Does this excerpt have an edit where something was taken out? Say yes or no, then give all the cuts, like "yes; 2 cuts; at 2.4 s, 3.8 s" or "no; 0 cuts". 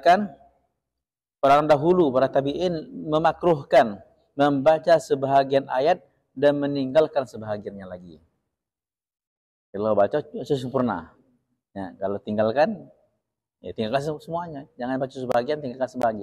no; 0 cuts